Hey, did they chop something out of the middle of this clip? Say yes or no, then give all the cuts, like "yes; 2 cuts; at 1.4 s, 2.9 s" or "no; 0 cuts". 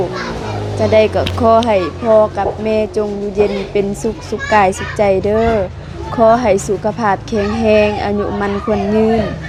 no; 0 cuts